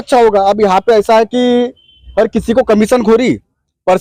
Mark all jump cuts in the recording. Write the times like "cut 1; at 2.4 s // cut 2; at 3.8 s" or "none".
none

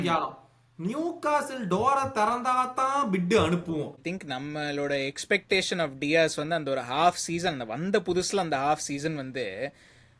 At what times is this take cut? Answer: cut 1; at 4.0 s

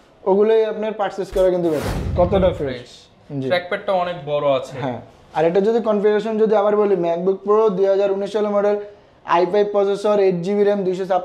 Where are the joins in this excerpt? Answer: cut 1; at 2.1 s

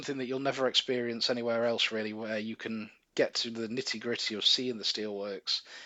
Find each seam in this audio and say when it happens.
none

